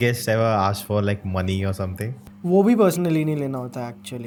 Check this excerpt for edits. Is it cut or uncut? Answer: uncut